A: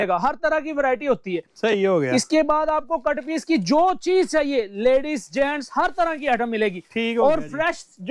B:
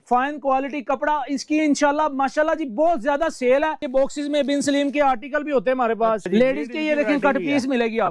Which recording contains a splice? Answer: B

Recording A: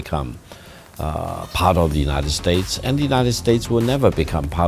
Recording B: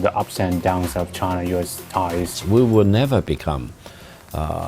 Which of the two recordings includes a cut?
B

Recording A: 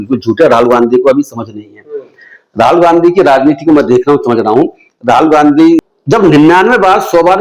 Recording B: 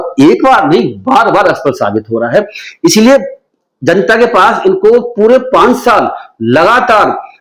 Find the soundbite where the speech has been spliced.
A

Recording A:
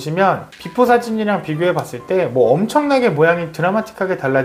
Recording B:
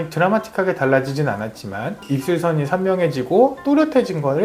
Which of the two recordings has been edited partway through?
B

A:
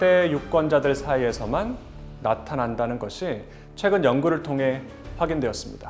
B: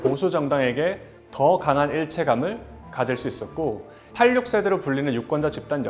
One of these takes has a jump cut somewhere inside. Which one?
B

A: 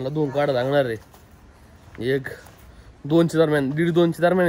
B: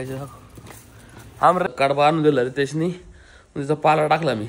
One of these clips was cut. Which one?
B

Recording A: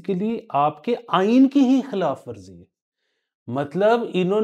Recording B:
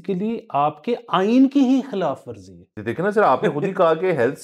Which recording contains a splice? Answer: B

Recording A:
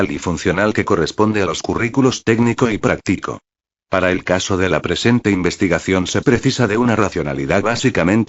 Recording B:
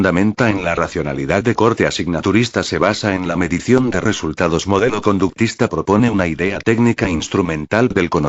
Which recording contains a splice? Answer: B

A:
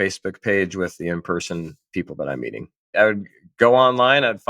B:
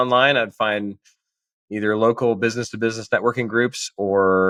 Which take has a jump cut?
A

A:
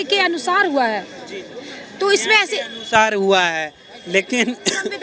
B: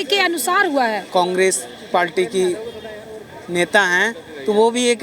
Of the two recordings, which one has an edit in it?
B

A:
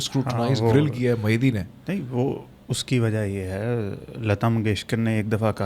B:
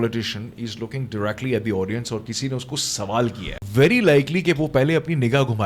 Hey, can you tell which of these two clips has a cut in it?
B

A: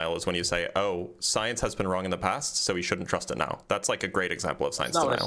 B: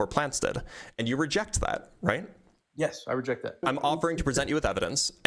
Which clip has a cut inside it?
B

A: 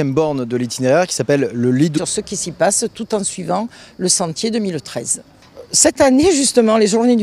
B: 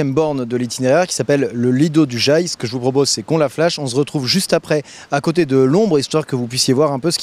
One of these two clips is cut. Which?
B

